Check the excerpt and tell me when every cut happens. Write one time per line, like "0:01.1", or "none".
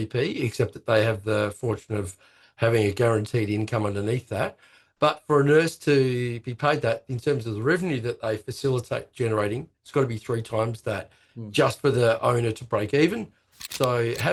none